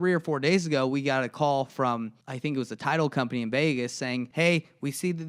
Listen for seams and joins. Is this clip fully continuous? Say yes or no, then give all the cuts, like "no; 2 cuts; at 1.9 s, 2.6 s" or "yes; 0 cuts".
no; 2 cuts; at 2.2 s, 4.3 s